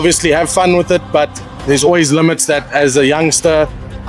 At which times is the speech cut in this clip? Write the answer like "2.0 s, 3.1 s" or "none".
none